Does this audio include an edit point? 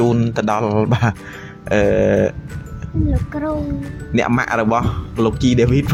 no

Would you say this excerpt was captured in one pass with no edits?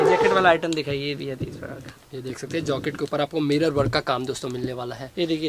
yes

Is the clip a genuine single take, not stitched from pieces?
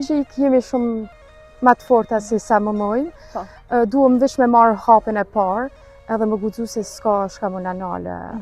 yes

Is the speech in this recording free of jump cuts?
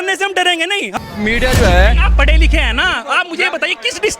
no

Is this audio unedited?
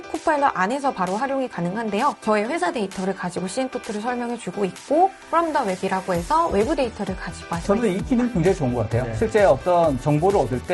no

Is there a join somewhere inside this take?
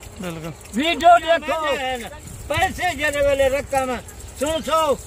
yes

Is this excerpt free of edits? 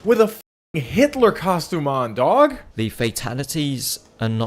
no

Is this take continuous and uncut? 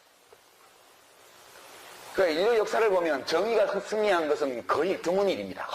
yes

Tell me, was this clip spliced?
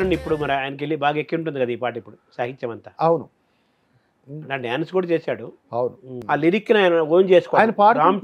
yes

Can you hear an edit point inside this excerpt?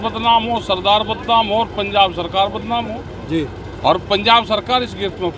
no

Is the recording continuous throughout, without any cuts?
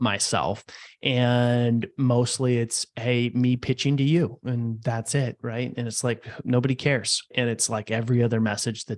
no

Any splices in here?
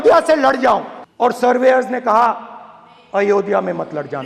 yes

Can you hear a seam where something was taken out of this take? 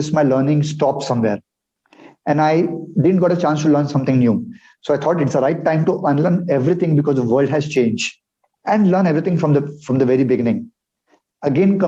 no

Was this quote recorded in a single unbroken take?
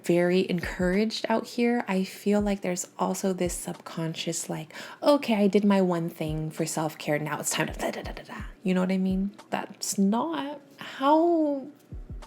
no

